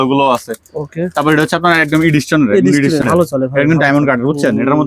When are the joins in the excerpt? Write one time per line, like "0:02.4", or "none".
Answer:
0:03.0